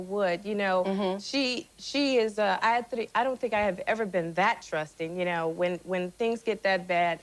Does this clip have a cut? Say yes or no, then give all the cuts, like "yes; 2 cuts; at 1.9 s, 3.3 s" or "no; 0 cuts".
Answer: yes; 1 cut; at 1.7 s